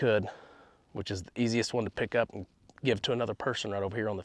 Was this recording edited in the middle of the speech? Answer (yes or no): no